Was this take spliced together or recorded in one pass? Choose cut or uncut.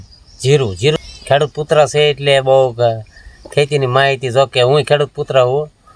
cut